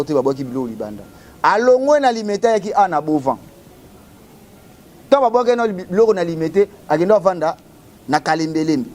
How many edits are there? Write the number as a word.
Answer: zero